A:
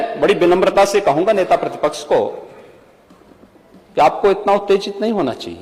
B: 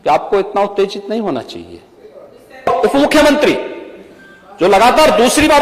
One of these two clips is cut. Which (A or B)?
B